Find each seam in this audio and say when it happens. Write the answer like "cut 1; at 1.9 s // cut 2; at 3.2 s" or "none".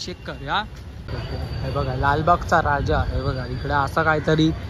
cut 1; at 1.1 s